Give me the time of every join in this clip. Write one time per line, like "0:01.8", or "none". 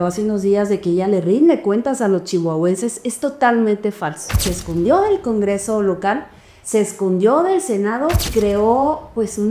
0:04.5
0:08.2